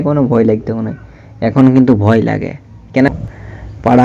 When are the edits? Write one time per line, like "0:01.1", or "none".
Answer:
0:03.1